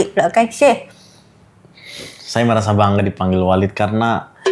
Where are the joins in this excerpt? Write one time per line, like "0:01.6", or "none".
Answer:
none